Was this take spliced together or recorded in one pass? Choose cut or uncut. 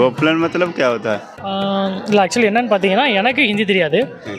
cut